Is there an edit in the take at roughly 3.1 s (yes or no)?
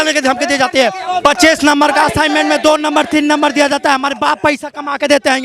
no